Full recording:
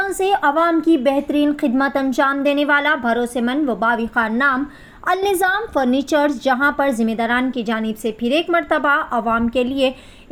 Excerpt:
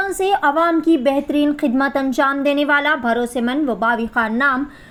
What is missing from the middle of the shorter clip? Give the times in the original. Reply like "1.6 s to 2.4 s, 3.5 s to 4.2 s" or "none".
none